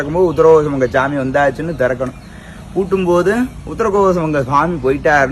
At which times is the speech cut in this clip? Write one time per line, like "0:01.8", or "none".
none